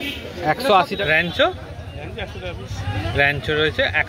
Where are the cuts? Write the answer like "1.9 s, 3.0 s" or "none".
1.0 s